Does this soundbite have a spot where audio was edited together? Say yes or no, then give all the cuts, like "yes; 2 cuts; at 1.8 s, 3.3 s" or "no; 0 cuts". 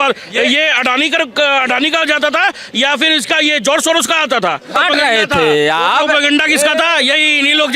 yes; 1 cut; at 4.8 s